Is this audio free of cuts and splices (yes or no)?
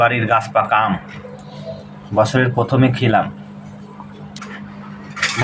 no